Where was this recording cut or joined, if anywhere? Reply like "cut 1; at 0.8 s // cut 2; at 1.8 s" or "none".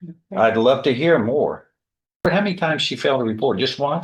cut 1; at 2.3 s